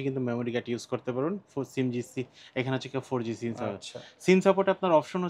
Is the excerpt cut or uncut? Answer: uncut